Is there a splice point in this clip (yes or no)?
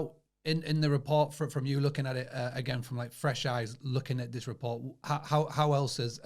no